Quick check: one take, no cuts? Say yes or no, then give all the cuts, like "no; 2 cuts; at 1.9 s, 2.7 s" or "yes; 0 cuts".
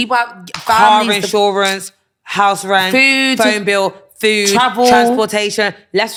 yes; 0 cuts